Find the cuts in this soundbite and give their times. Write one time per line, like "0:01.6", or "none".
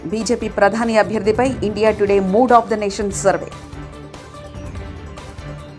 none